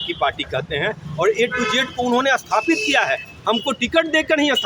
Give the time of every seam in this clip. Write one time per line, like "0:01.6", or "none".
none